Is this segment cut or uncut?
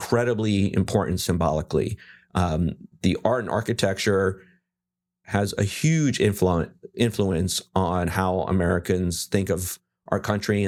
uncut